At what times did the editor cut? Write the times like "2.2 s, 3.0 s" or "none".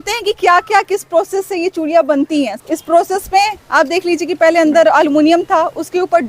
2.6 s